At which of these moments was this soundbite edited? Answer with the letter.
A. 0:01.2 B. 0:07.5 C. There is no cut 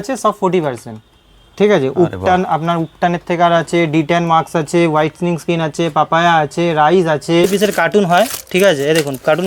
B